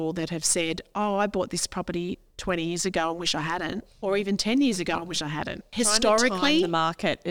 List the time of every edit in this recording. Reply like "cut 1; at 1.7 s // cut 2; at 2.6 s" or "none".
cut 1; at 5.6 s

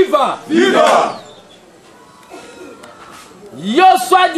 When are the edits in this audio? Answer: none

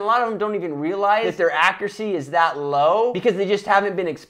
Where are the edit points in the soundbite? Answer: cut 1; at 1.3 s // cut 2; at 3.2 s

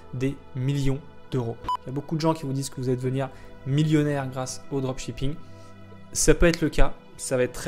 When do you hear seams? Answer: cut 1; at 1.6 s

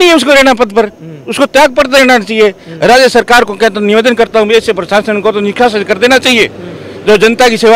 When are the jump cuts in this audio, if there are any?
none

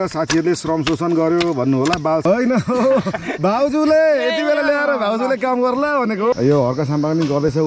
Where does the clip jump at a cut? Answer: cut 1; at 2.3 s // cut 2; at 6.3 s

